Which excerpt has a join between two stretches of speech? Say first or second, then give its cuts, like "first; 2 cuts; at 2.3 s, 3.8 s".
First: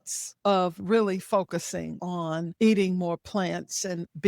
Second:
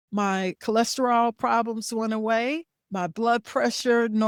first; 1 cut; at 2.3 s